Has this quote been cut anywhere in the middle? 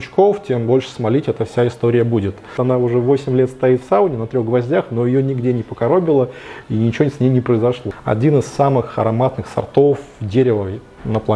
yes; 2 cuts; at 2.5 s, 7.9 s

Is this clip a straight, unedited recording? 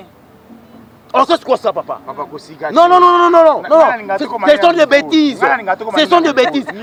yes; 0 cuts

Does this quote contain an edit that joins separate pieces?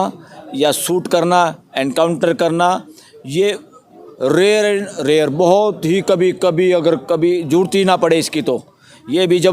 no; 0 cuts

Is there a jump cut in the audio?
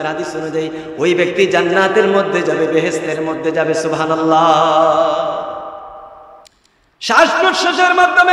yes; 1 cut; at 6.4 s

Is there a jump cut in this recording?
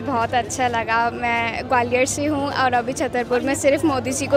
no; 0 cuts

